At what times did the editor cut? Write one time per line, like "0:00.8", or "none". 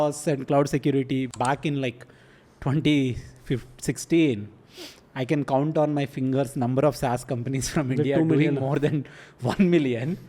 0:01.3